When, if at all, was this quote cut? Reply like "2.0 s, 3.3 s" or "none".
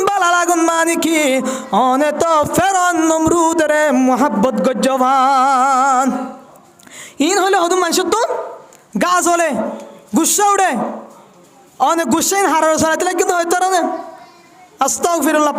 none